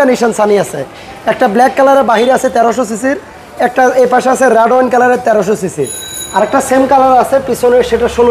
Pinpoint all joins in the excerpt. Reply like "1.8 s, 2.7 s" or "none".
none